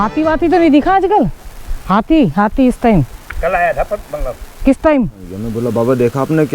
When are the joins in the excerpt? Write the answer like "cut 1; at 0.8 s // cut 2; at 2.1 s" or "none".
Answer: cut 1; at 5.4 s